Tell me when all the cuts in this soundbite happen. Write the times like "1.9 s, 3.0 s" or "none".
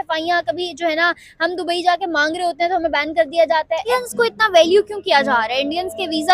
3.9 s